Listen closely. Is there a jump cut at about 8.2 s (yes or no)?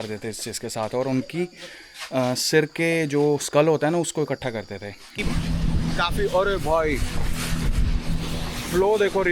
no